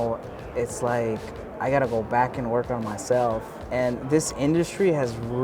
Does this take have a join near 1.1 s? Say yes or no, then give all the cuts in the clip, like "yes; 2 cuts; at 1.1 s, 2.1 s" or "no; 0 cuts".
no; 1 cut; at 3.6 s